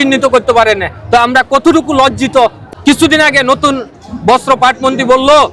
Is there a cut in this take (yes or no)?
yes